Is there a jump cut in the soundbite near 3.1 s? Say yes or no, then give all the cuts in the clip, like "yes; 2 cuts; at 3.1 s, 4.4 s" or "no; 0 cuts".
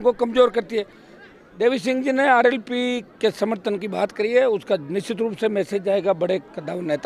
no; 1 cut; at 1.0 s